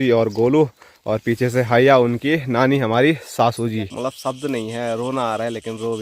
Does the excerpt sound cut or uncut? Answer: cut